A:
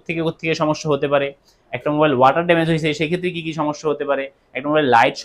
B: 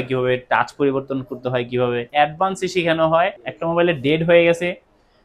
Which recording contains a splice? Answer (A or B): B